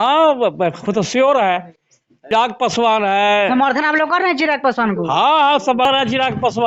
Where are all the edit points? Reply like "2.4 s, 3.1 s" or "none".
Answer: 2.3 s, 5.9 s